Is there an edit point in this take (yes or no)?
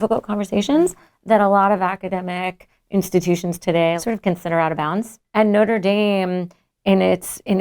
yes